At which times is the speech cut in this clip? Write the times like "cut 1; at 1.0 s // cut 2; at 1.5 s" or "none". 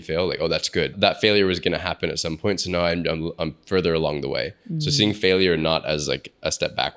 cut 1; at 0.9 s